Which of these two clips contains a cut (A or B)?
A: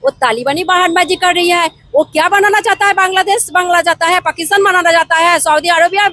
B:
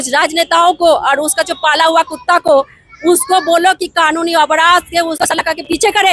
B